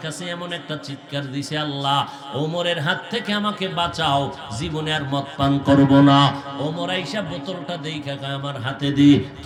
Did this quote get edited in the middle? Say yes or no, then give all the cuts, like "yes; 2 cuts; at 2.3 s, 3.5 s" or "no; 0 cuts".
no; 0 cuts